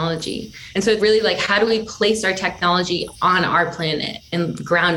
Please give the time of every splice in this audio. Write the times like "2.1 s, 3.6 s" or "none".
1.0 s